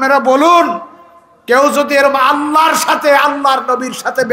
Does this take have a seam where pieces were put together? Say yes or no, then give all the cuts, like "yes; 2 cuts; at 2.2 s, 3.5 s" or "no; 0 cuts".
no; 0 cuts